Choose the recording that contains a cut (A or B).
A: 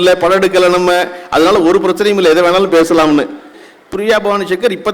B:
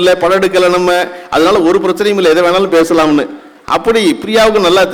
A